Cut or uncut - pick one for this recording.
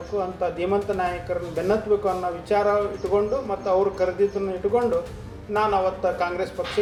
uncut